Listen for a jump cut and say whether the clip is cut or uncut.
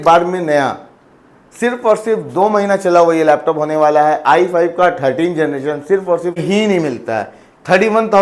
cut